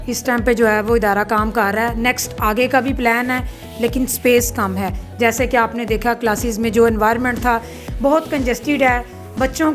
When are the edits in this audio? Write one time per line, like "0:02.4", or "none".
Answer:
none